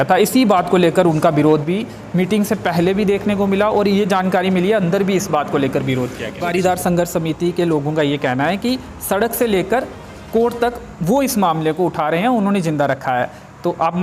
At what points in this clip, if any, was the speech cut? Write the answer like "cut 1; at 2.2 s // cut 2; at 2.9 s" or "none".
cut 1; at 6.4 s